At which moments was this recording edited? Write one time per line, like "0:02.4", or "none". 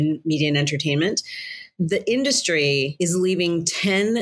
none